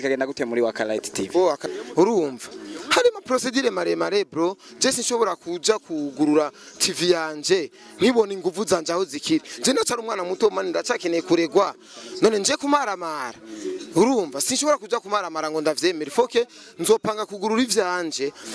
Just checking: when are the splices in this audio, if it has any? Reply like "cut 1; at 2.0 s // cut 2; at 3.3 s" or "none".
cut 1; at 1.6 s